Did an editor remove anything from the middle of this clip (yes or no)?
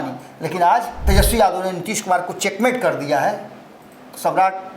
yes